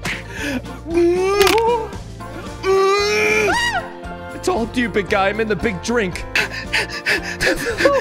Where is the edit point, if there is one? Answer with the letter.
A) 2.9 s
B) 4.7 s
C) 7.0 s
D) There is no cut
D